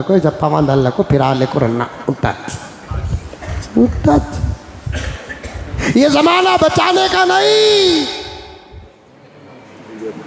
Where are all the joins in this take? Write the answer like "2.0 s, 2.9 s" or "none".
5.8 s